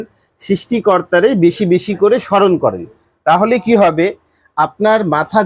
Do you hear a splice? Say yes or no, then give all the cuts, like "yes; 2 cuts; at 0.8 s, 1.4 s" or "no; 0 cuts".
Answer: no; 0 cuts